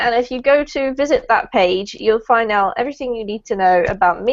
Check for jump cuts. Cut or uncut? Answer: cut